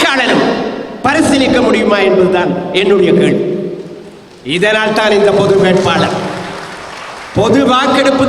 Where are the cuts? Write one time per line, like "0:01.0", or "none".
none